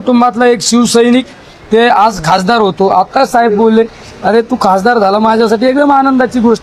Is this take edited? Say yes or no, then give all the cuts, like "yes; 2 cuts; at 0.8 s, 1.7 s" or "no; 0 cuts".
no; 0 cuts